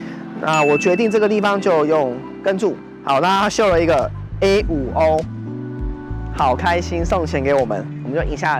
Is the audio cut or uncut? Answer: uncut